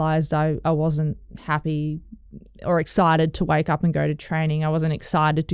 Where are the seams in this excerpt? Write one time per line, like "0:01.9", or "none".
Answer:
none